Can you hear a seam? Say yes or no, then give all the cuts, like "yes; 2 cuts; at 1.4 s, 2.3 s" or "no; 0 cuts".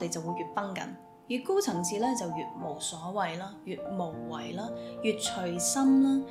no; 0 cuts